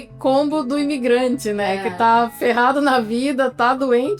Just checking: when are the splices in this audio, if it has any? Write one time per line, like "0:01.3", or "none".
none